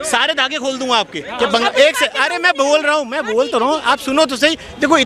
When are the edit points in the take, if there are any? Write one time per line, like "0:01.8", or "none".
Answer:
0:01.3